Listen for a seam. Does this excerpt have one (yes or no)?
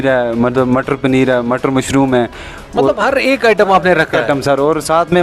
no